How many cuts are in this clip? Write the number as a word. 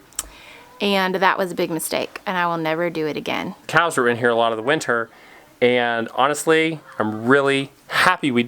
one